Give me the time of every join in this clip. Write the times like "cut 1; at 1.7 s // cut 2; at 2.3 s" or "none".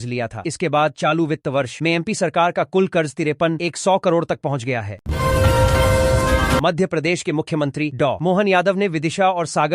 cut 1; at 5.0 s // cut 2; at 6.6 s